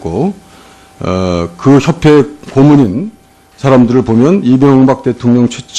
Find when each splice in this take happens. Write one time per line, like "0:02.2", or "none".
0:04.5